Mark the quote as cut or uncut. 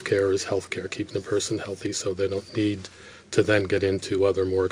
uncut